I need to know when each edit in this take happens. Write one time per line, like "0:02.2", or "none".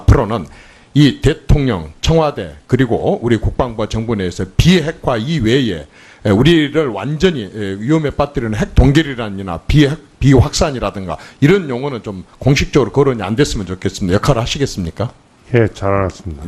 0:10.0